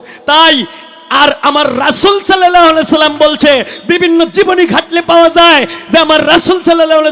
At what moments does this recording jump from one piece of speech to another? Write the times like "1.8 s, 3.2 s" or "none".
none